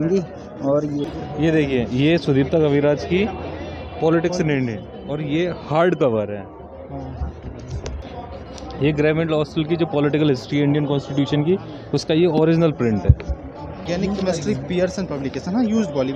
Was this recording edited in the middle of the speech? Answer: yes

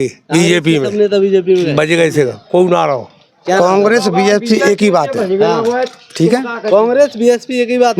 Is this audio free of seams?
yes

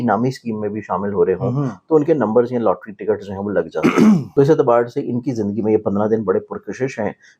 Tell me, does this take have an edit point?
yes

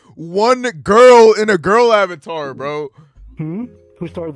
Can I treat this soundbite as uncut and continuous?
yes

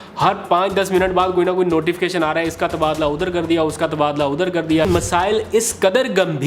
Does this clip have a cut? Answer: yes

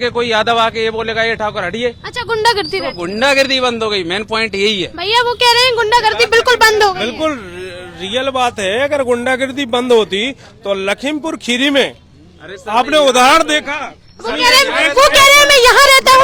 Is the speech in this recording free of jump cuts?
yes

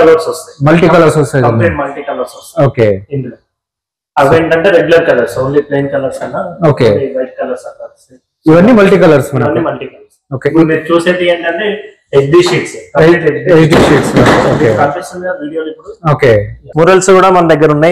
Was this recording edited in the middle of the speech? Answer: yes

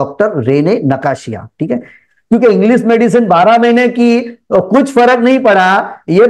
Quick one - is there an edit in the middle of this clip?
yes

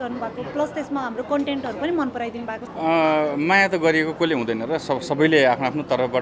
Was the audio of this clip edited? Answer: yes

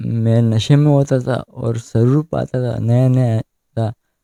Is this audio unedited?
yes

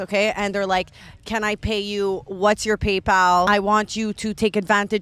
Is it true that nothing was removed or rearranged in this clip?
no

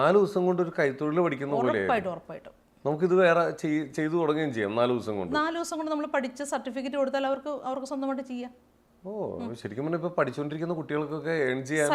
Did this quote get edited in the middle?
no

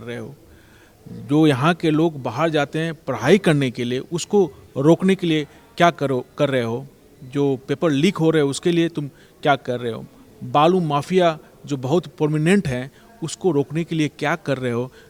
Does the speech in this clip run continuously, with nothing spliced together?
yes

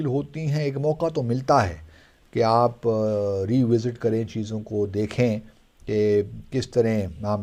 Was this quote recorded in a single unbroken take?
yes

